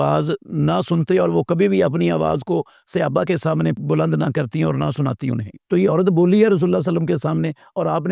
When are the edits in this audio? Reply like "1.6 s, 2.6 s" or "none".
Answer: 3.8 s, 5.5 s